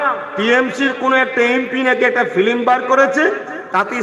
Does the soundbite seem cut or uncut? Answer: uncut